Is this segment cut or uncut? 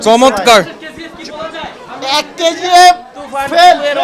uncut